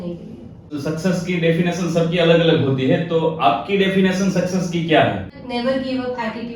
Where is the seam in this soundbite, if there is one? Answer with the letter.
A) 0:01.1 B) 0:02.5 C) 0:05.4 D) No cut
C